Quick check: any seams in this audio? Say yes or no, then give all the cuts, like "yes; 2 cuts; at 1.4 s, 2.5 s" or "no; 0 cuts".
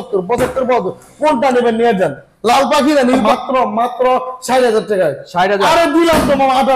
yes; 1 cut; at 3.2 s